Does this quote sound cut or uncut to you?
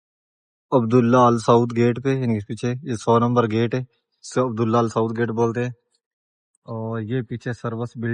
uncut